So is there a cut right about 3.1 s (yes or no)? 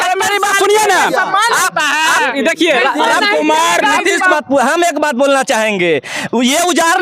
no